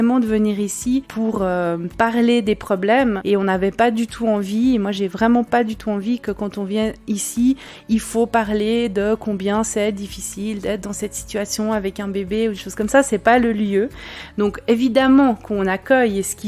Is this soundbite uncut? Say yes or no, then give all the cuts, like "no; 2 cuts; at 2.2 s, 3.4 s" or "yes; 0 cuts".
no; 1 cut; at 1.1 s